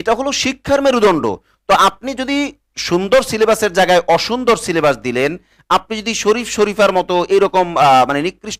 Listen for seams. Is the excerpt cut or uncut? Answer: uncut